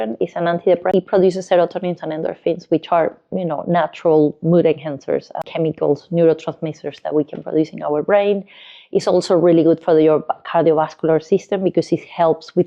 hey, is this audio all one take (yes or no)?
no